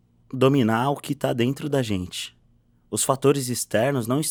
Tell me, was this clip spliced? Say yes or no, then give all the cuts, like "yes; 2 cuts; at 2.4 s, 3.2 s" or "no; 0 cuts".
no; 0 cuts